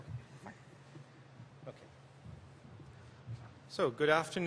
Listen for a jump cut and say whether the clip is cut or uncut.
cut